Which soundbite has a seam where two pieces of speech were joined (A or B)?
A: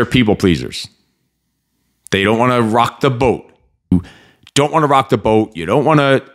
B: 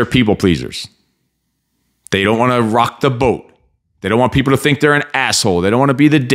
A